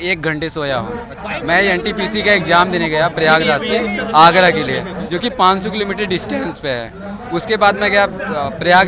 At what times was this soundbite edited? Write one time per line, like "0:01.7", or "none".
none